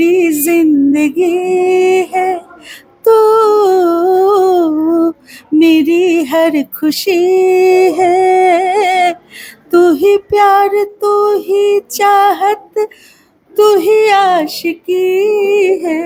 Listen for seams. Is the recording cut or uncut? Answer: uncut